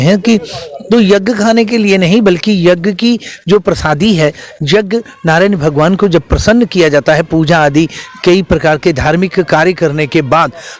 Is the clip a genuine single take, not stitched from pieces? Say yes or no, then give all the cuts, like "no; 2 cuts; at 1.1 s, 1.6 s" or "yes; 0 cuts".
yes; 0 cuts